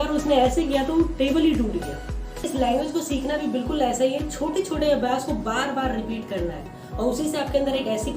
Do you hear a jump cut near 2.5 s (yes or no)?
yes